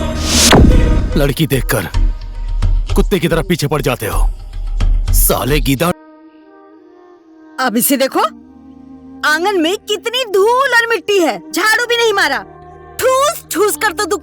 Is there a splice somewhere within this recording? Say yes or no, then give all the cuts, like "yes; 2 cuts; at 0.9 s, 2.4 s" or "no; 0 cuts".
yes; 1 cut; at 5.9 s